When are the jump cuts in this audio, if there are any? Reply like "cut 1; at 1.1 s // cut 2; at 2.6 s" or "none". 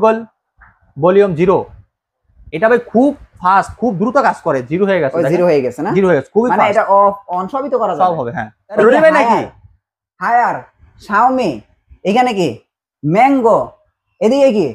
cut 1; at 8.8 s